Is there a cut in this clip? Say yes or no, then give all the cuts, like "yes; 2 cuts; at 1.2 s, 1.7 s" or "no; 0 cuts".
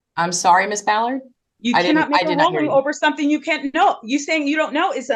no; 0 cuts